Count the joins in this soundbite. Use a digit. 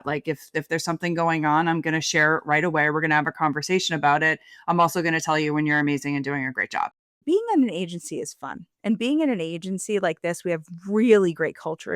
1